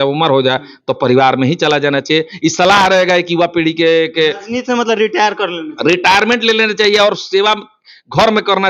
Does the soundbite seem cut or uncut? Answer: uncut